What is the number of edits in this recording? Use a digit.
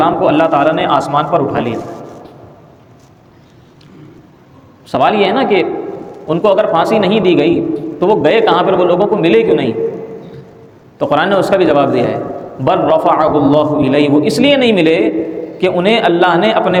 0